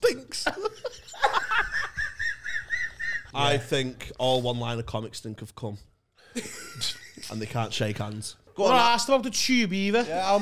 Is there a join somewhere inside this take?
yes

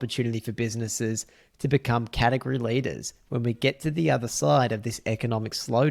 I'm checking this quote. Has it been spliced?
no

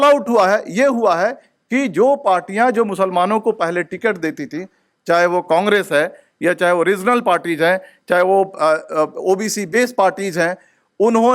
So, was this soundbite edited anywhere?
no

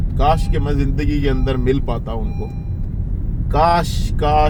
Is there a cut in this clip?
no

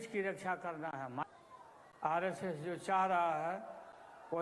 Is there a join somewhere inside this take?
yes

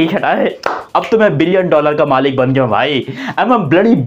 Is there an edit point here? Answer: no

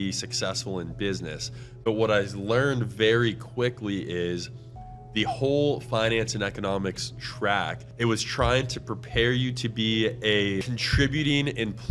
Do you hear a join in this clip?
yes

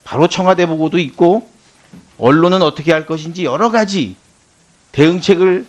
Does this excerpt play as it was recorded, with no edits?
no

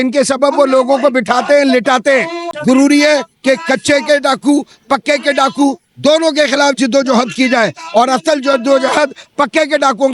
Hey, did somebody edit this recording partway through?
yes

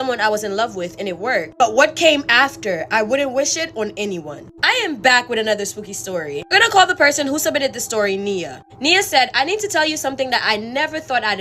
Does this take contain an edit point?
no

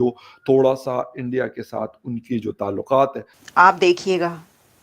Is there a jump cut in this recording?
yes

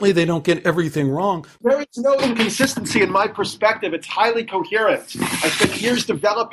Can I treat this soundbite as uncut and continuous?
no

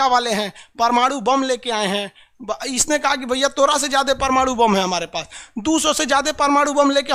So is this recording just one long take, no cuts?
yes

